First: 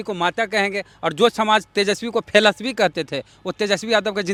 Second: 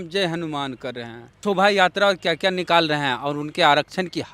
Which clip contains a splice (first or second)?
second